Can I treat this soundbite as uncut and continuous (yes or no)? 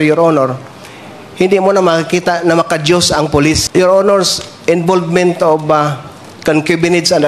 no